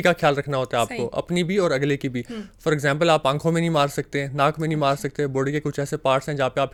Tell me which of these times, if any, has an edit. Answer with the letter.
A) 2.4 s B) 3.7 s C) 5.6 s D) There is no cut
D